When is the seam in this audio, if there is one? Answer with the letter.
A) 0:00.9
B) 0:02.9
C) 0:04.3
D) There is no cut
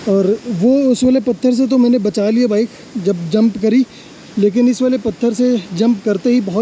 D